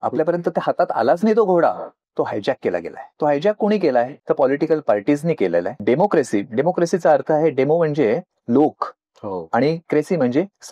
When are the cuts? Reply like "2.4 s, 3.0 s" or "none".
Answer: 3.0 s, 4.2 s, 5.7 s